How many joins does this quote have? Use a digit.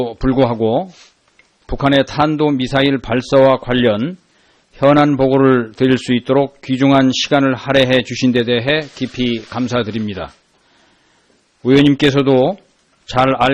0